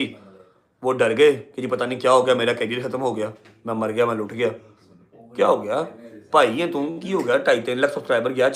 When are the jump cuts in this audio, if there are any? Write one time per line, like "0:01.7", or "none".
none